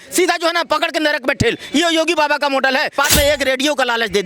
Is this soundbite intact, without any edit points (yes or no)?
no